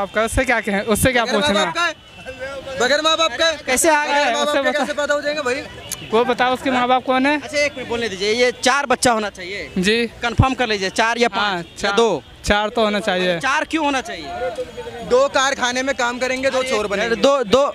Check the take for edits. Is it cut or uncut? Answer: uncut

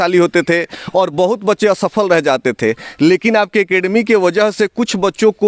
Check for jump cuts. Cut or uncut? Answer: uncut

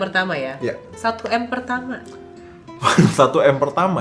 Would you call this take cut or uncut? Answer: uncut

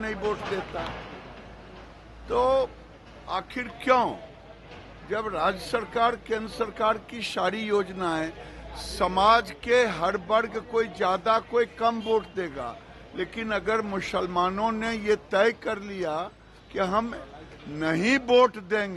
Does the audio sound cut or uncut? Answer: uncut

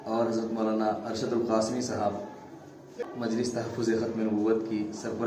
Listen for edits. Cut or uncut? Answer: cut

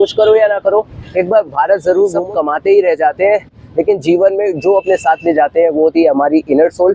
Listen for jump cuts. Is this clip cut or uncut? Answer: cut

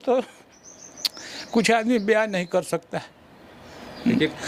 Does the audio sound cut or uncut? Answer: uncut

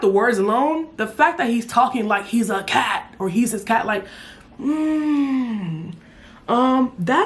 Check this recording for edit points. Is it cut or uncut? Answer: uncut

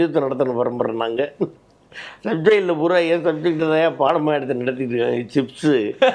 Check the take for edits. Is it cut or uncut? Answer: uncut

